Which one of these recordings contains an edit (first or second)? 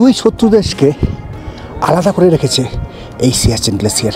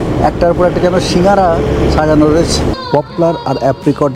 second